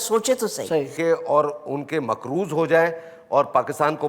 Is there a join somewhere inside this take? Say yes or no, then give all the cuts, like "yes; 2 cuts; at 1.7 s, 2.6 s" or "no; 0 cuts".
yes; 1 cut; at 0.9 s